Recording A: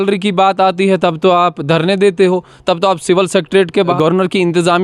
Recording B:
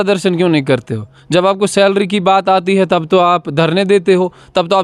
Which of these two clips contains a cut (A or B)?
A